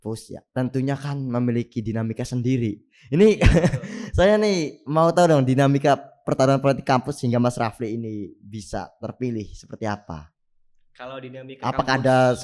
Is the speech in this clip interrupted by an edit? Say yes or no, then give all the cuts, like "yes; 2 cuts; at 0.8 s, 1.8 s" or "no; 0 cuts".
no; 0 cuts